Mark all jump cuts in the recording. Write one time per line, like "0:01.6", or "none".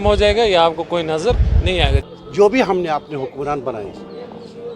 0:02.0